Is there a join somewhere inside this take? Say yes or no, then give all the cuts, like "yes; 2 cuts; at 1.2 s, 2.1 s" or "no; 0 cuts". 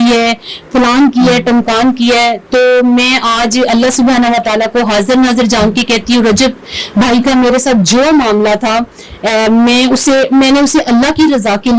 no; 0 cuts